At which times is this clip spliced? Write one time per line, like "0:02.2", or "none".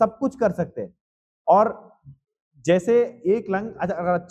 none